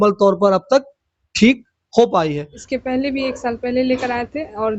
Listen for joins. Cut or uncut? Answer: cut